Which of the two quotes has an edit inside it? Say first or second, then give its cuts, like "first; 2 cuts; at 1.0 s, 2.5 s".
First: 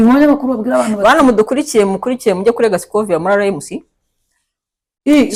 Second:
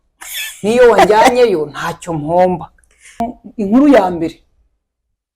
second; 1 cut; at 3.4 s